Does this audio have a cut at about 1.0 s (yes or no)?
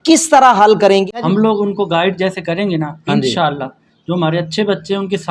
yes